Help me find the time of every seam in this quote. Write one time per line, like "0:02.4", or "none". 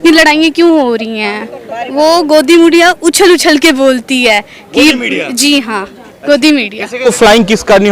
0:07.0